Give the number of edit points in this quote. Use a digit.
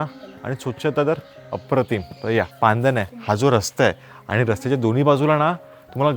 1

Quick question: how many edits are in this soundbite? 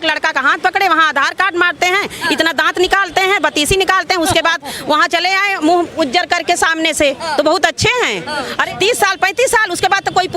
1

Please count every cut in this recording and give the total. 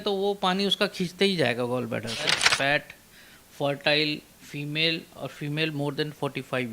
1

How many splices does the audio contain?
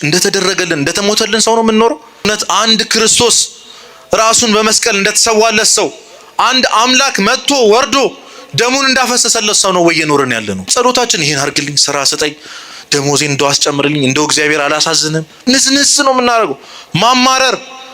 3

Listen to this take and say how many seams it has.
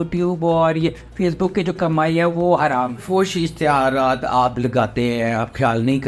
1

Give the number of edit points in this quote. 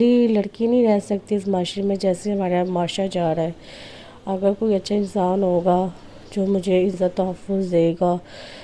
1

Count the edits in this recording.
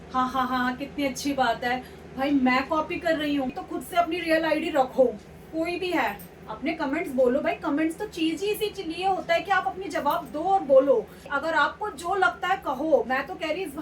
2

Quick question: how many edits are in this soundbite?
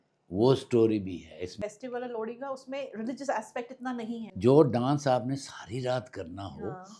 2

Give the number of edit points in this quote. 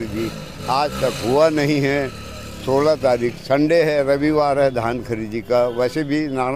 0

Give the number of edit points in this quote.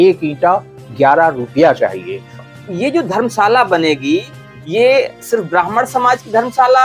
1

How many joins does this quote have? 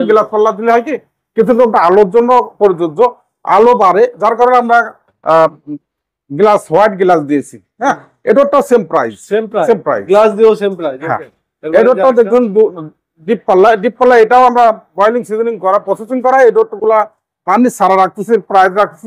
0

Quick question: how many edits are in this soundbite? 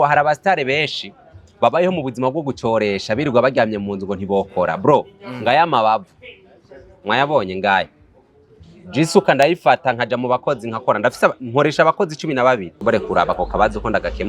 1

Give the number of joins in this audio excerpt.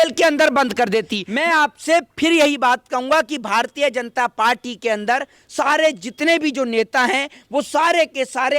1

